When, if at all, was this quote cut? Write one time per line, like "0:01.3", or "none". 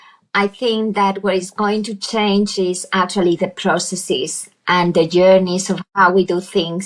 none